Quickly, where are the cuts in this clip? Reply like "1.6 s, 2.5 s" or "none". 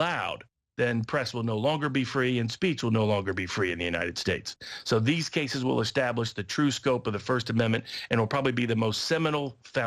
3.5 s